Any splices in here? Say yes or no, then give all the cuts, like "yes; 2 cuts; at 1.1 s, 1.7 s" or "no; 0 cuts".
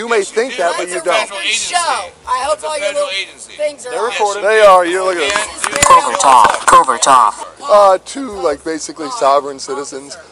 yes; 2 cuts; at 2.1 s, 7.5 s